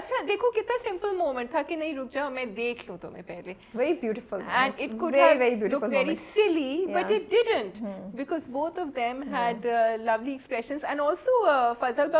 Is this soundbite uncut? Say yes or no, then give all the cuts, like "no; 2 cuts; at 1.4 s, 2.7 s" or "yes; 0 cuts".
yes; 0 cuts